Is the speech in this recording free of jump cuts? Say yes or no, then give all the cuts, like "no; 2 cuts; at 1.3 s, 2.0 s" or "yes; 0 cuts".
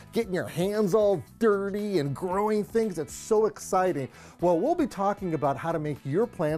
yes; 0 cuts